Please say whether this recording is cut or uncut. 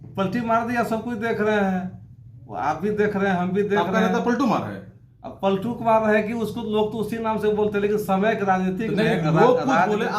uncut